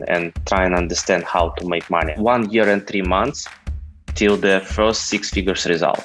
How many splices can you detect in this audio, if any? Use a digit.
1